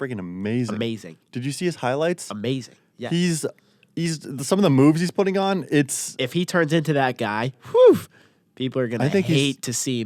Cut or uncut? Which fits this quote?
uncut